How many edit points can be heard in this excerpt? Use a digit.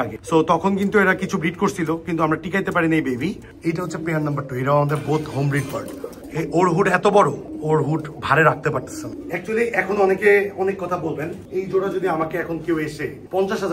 3